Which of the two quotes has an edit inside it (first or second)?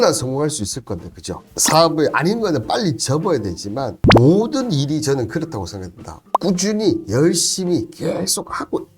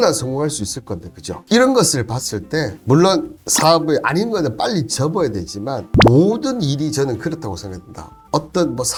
first